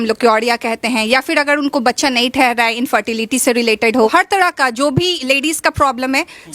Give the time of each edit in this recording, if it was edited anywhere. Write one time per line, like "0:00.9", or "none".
0:04.1

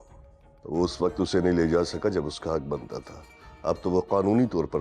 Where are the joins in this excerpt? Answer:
none

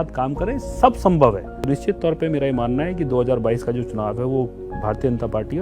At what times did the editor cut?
0:01.5

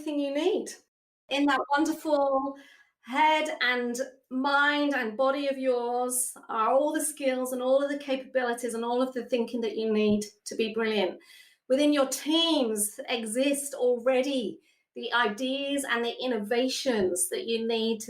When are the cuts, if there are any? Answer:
0:01.2

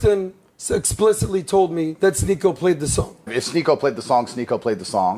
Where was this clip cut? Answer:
0:01.9

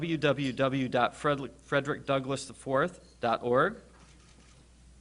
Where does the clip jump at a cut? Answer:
none

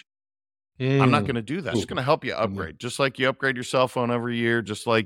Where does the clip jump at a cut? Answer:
0:01.7

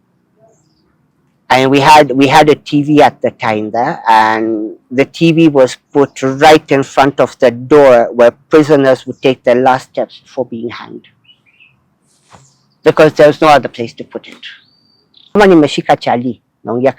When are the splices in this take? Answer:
0:15.4

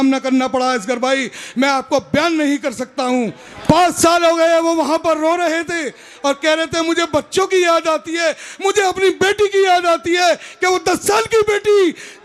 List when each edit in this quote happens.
0:03.5

